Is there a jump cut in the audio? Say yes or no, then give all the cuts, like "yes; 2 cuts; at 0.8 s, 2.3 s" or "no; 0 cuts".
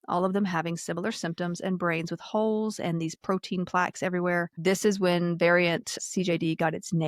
yes; 2 cuts; at 4.5 s, 5.9 s